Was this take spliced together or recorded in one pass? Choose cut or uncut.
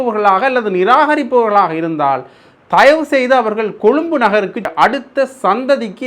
cut